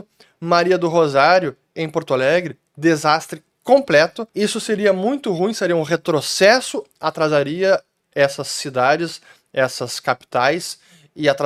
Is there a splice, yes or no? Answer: no